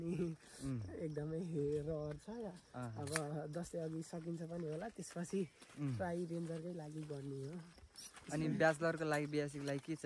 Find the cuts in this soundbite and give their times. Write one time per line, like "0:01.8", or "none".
none